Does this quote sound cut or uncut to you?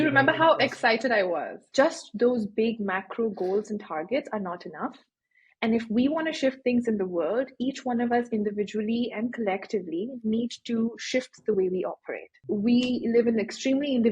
cut